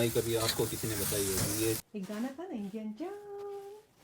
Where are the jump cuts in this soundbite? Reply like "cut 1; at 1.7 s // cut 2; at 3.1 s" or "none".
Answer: cut 1; at 1.8 s

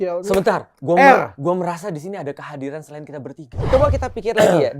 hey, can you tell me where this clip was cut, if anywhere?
cut 1; at 3.7 s

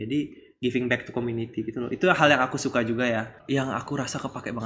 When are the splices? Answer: cut 1; at 3.4 s

